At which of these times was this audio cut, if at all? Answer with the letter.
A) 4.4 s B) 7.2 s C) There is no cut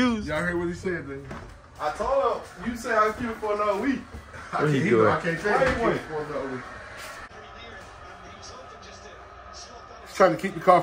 B